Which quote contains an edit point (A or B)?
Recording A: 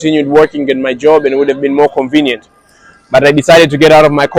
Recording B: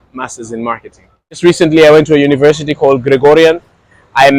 B